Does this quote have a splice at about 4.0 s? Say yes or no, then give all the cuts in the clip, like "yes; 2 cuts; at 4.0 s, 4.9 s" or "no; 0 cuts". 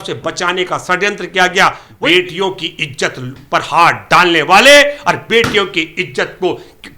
no; 1 cut; at 1.9 s